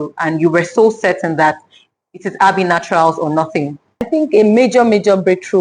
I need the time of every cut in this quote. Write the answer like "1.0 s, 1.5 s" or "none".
4.1 s